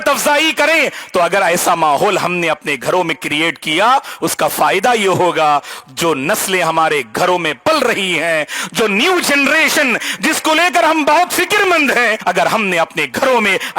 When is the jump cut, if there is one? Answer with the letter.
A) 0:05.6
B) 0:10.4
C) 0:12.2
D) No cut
C